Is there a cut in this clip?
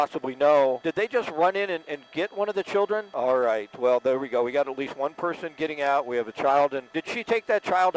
yes; 3 cuts; at 0.8 s, 3.1 s, 6.9 s

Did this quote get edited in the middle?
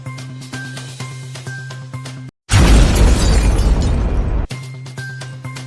no; 0 cuts

